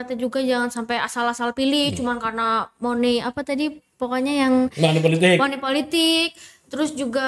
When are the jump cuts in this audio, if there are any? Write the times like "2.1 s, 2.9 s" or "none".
none